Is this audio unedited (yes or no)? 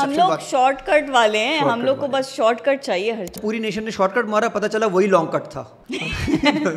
no